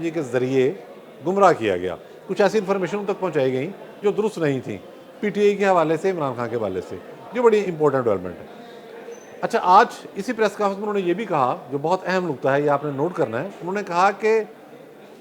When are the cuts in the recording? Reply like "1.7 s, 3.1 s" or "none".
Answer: none